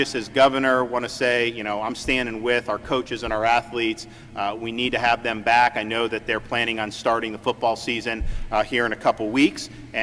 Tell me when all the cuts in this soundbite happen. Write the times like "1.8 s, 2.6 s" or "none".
none